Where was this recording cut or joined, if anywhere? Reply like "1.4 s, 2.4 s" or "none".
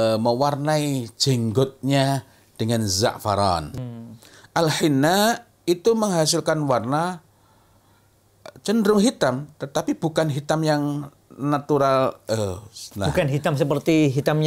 3.8 s